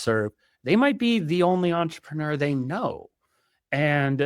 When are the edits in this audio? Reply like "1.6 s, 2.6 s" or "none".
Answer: none